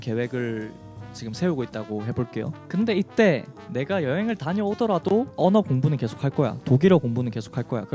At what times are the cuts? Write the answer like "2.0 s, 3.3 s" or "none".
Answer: 2.6 s, 5.3 s